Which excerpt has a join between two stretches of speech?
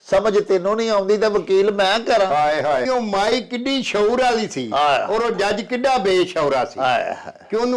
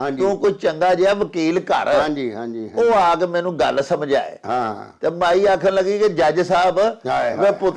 first; 1 cut; at 2.8 s

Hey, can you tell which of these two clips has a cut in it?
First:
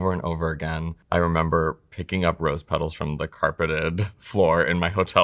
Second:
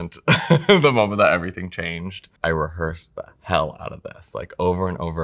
second; 1 cut; at 2.3 s

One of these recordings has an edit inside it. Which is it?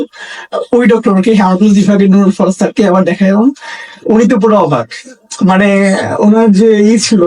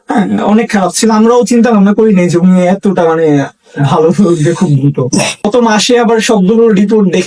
second; 1 cut; at 5.4 s

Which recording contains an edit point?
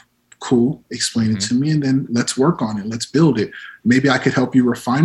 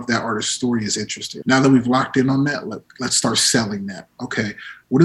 second; 1 cut; at 1.2 s

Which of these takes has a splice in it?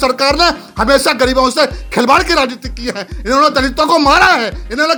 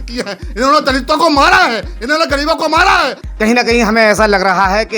second; 1 cut; at 3.2 s

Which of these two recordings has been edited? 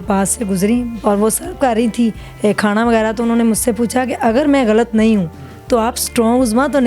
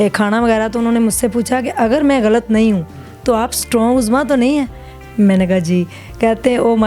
first; 1 cut; at 0.9 s

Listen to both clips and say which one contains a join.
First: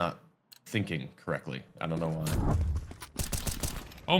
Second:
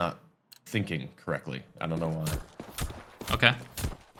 first; 1 cut; at 2.5 s

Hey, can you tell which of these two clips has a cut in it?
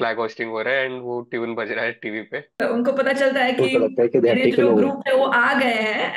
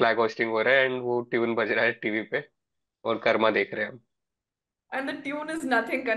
first; 1 cut; at 2.6 s

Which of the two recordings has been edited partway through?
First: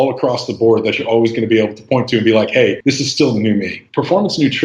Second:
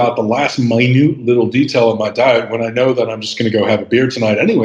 first; 2 cuts; at 2.8 s, 3.8 s

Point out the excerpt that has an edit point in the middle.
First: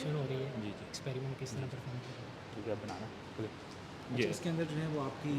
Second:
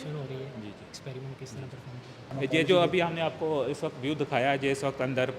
second; 1 cut; at 2.3 s

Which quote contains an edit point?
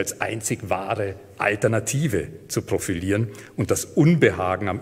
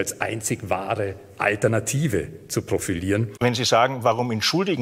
second; 1 cut; at 3.3 s

